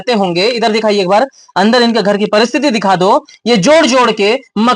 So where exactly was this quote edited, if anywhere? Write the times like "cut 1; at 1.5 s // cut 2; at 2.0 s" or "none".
none